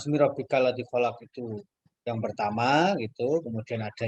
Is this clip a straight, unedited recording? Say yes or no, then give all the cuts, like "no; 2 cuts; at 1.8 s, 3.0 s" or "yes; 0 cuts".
yes; 0 cuts